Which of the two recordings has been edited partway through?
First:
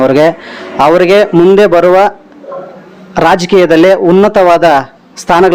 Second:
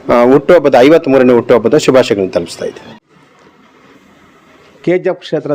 second; 1 cut; at 3.0 s

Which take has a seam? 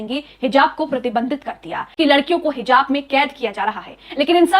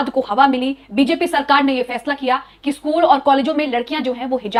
first; 1 cut; at 1.9 s

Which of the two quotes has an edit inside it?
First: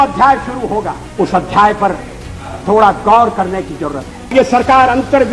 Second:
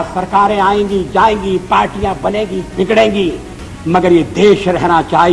first; 2 cuts; at 1.0 s, 4.3 s

